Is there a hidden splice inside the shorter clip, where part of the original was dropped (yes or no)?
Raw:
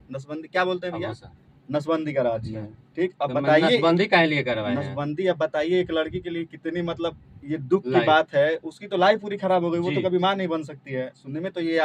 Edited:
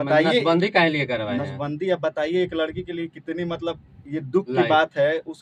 no